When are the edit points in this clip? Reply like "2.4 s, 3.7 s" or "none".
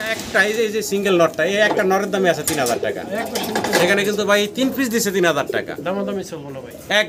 none